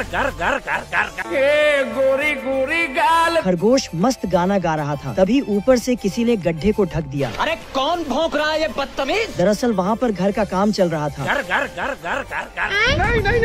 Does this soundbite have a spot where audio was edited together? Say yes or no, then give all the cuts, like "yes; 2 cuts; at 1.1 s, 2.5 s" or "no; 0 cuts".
yes; 1 cut; at 1.1 s